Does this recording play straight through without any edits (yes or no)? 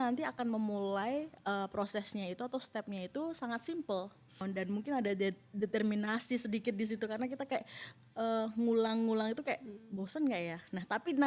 no